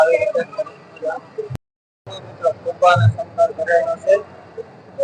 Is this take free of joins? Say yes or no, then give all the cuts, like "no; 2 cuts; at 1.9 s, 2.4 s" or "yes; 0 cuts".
no; 1 cut; at 1.5 s